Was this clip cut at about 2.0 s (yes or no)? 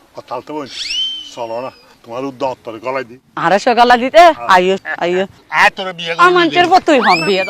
yes